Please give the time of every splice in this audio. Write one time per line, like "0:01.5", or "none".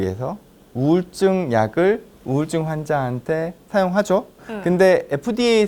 0:04.5